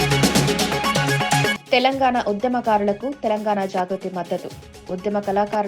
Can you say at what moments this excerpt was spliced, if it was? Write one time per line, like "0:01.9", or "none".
0:01.5